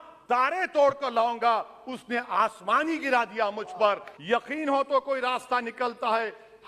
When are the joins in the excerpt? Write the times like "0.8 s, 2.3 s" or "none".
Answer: 4.1 s